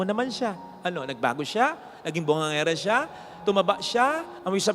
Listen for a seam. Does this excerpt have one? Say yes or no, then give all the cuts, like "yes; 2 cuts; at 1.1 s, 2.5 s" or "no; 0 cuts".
no; 0 cuts